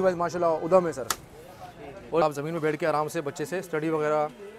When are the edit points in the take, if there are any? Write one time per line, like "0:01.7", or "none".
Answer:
0:02.2